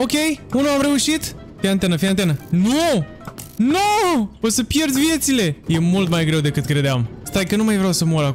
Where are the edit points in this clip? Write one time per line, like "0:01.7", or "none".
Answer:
0:02.4
0:04.3
0:05.6